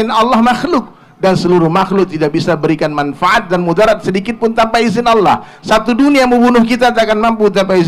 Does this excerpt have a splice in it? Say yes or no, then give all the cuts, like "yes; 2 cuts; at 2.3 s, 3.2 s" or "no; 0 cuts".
no; 0 cuts